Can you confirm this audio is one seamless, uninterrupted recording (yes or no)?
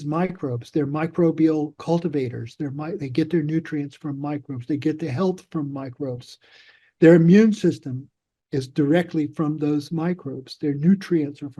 yes